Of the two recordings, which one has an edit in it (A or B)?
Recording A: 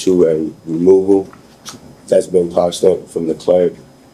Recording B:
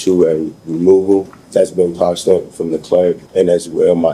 B